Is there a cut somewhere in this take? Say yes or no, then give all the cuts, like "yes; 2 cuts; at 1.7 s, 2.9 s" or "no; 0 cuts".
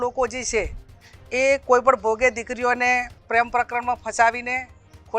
yes; 1 cut; at 3.1 s